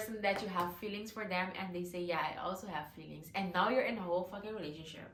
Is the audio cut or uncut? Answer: uncut